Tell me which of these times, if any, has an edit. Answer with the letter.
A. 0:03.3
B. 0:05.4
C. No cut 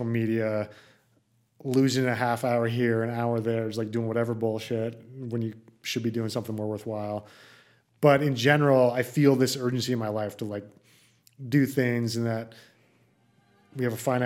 C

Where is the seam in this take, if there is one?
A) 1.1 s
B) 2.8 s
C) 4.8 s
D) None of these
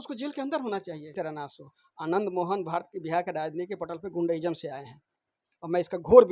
A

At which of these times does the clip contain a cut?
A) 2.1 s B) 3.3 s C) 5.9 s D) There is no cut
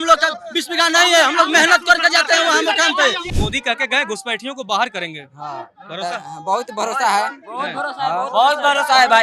B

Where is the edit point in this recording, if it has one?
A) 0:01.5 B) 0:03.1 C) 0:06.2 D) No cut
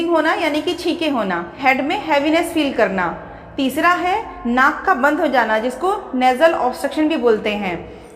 A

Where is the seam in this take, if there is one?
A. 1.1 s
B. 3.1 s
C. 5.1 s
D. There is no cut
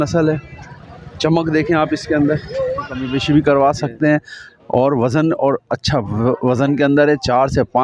B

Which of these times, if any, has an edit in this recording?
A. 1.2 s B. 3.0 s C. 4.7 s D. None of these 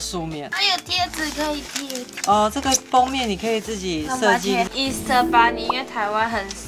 C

